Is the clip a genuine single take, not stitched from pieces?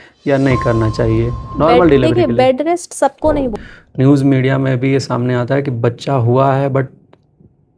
no; 1 cut; at 3.5 s

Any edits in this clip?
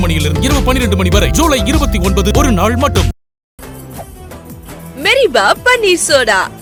no; 0 cuts

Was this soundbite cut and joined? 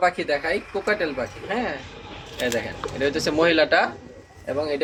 no; 0 cuts

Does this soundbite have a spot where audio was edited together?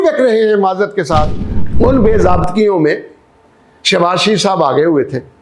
yes; 1 cut; at 1.4 s

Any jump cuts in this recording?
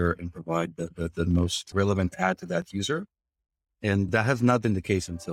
yes; 2 cuts; at 1.6 s, 4.1 s

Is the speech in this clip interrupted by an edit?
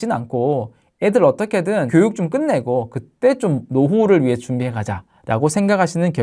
yes; 2 cuts; at 1.9 s, 3.6 s

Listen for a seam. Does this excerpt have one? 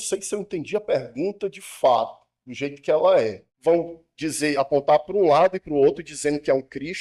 yes; 1 cut; at 3.5 s

